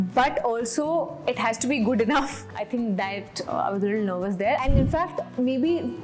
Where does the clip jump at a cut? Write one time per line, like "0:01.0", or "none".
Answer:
0:02.5
0:04.6